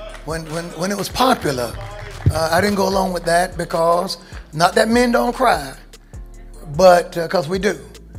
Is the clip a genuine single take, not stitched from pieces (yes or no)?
no